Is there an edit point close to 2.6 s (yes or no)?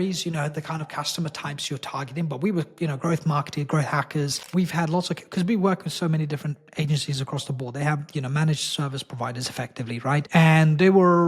no